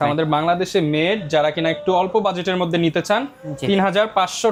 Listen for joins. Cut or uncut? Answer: uncut